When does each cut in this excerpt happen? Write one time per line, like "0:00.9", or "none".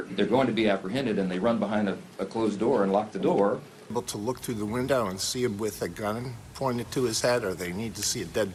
none